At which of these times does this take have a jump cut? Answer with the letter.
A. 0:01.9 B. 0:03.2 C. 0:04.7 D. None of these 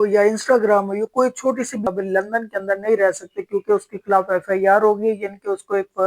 A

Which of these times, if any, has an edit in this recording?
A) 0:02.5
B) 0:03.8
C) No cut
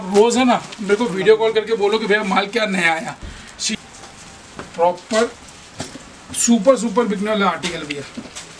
B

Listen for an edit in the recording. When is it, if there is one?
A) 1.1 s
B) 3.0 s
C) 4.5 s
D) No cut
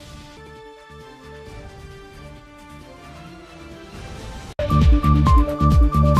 C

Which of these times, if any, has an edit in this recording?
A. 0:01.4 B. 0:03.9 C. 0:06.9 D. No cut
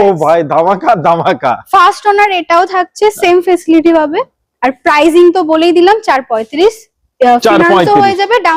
D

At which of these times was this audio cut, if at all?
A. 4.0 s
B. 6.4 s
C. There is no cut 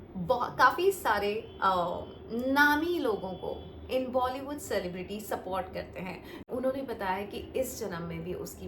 B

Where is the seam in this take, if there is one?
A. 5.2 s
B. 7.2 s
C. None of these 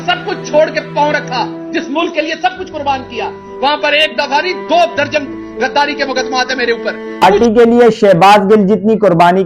B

